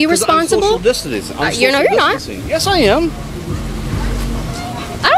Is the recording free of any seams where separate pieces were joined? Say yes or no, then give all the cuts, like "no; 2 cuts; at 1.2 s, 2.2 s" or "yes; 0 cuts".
yes; 0 cuts